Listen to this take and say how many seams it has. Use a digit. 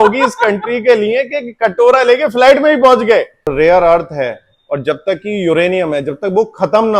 1